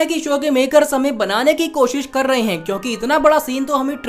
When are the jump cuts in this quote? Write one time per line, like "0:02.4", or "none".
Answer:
none